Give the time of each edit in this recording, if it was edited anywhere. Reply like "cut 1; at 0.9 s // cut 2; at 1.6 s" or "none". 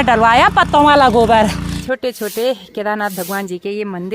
cut 1; at 1.7 s